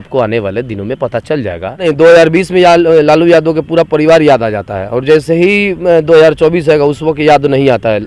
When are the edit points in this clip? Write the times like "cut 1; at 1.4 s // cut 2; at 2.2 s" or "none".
cut 1; at 1.9 s